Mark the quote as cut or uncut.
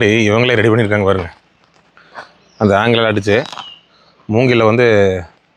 uncut